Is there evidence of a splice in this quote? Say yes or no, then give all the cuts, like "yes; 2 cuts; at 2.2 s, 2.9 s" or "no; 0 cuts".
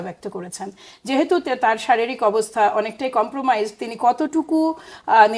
no; 0 cuts